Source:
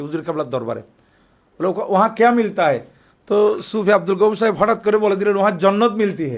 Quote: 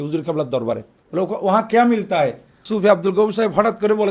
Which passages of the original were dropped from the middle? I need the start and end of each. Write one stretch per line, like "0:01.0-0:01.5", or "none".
0:00.9-0:01.4
0:03.1-0:03.7